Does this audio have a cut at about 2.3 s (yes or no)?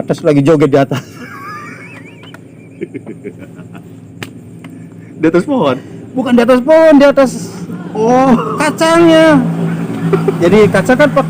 no